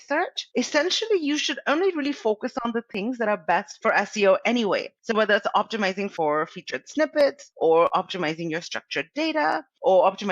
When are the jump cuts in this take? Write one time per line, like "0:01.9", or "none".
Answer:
0:06.1